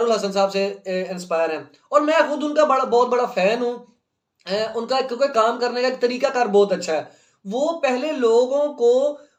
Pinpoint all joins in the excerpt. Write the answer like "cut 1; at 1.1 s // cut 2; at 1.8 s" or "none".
none

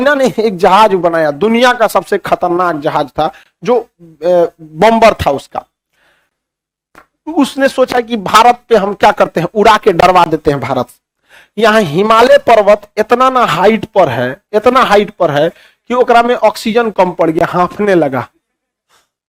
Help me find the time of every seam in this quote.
none

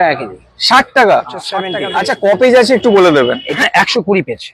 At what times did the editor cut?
cut 1; at 1.7 s // cut 2; at 3.6 s

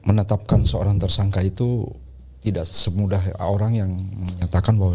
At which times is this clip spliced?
none

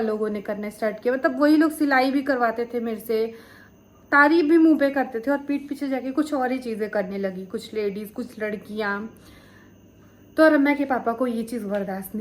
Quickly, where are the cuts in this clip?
none

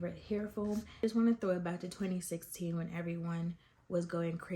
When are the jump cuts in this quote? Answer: cut 1; at 1.0 s

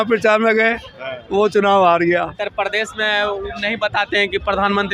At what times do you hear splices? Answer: cut 1; at 2.4 s

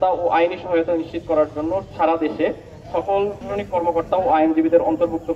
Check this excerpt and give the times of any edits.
cut 1; at 1.9 s // cut 2; at 3.4 s

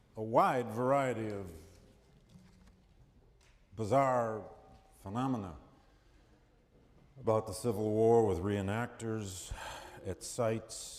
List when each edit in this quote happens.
none

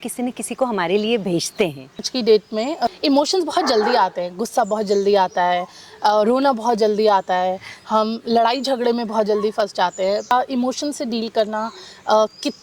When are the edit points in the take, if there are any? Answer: cut 1; at 2.1 s // cut 2; at 3.0 s // cut 3; at 10.3 s

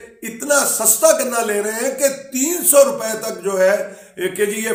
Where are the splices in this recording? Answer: none

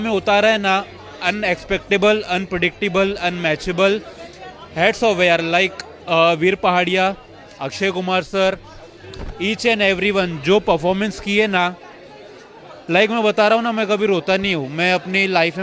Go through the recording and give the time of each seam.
none

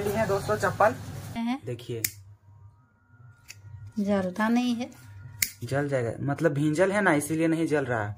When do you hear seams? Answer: cut 1; at 1.4 s

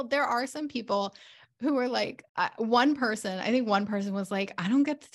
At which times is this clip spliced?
cut 1; at 2.2 s

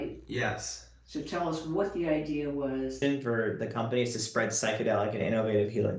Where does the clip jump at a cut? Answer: cut 1; at 3.0 s

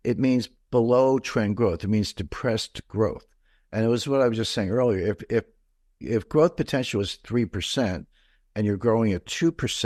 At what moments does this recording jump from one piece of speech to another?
none

